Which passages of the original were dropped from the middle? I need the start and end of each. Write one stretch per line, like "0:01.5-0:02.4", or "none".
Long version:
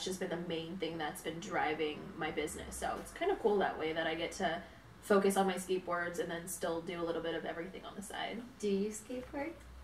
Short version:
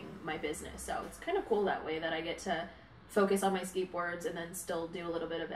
none